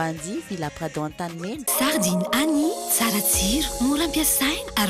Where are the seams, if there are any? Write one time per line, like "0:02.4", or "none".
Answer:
0:01.6